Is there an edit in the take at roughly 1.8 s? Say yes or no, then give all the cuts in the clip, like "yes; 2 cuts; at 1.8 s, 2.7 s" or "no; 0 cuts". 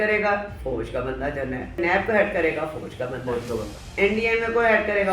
yes; 2 cuts; at 1.8 s, 3.8 s